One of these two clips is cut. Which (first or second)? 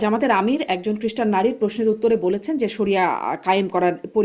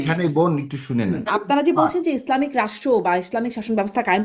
second